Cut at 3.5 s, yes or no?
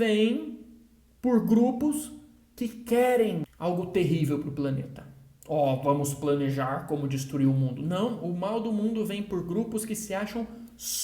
yes